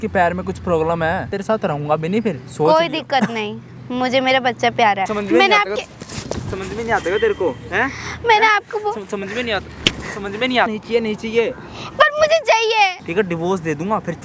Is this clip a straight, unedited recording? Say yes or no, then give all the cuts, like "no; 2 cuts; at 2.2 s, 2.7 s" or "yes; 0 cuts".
no; 4 cuts; at 1.4 s, 5.1 s, 10.7 s, 13.0 s